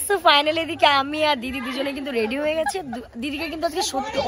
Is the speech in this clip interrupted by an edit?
no; 0 cuts

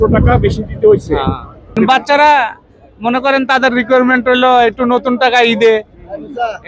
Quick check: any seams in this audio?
yes; 1 cut; at 1.8 s

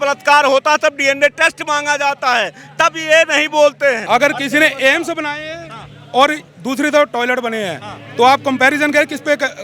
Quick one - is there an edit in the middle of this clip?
yes; 1 cut; at 4.0 s

